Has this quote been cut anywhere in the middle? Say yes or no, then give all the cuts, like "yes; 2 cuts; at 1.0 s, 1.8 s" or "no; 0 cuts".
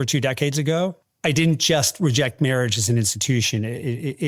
yes; 1 cut; at 1.1 s